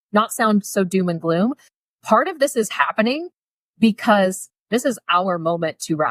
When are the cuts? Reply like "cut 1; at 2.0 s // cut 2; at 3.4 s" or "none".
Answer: cut 1; at 4.6 s